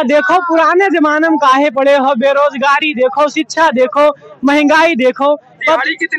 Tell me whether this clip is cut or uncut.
uncut